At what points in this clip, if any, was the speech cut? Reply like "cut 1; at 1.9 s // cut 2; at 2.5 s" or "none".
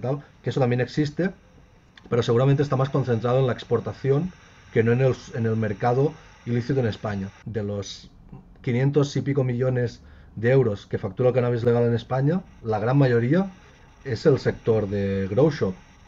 cut 1; at 7.4 s

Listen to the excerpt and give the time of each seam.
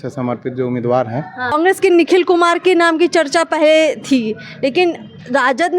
cut 1; at 1.5 s

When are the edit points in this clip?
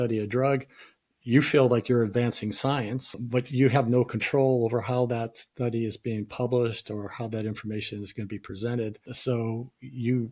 cut 1; at 3.2 s // cut 2; at 9.1 s

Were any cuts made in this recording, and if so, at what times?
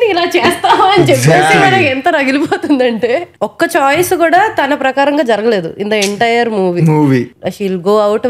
cut 1; at 3.4 s // cut 2; at 7.3 s

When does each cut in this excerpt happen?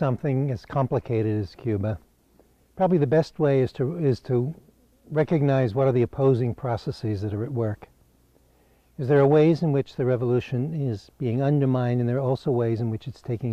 none

